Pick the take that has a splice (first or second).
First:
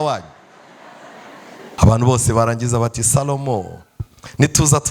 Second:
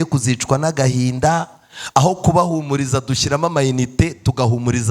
first